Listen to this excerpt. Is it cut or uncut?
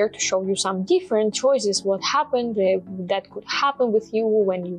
uncut